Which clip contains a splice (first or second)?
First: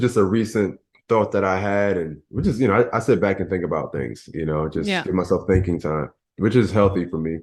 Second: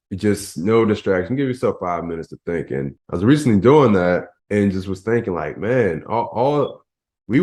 second